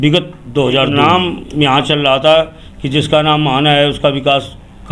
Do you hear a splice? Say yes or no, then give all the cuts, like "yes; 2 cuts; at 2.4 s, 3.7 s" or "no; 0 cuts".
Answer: yes; 1 cut; at 0.9 s